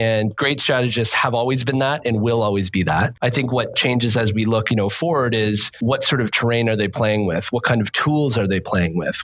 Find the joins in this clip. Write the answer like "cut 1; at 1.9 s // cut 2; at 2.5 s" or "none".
cut 1; at 3.6 s // cut 2; at 4.7 s // cut 3; at 5.7 s